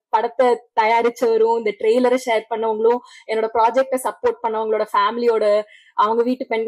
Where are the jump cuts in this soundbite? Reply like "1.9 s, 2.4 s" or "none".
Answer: none

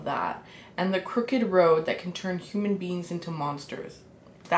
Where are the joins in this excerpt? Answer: none

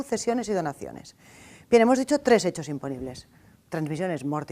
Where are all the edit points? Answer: 1.0 s

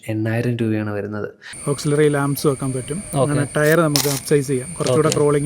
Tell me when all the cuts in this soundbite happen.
1.5 s

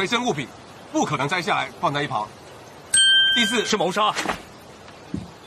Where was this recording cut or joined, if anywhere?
1.1 s

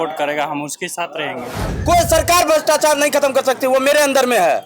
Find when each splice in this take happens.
1.7 s

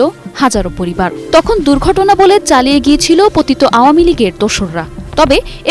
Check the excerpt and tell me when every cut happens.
1.2 s

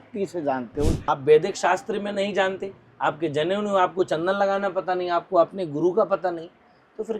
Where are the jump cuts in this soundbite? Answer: 1.0 s

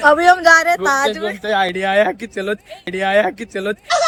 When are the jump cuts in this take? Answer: none

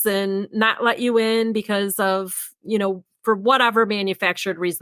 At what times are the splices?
none

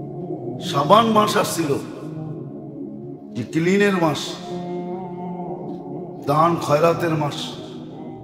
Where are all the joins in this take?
0.7 s, 1.8 s, 3.5 s, 4.5 s, 6.2 s

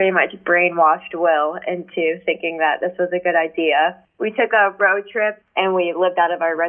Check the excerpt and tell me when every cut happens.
5.4 s

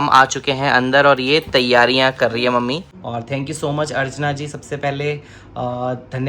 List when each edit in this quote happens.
2.9 s

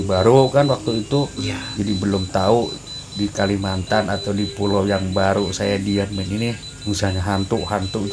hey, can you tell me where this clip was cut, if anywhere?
6.7 s

